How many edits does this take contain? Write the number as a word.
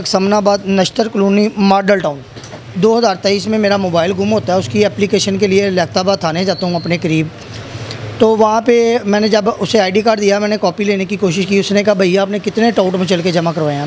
one